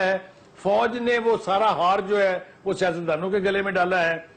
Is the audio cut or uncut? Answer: uncut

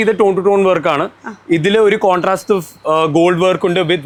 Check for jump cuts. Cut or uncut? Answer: uncut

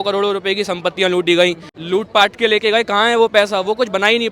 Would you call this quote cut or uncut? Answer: cut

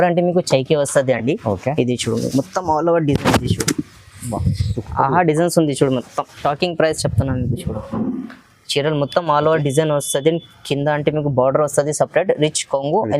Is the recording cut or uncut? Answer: cut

